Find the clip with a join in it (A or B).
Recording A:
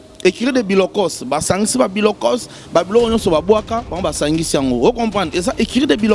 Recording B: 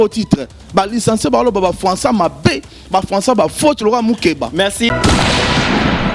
B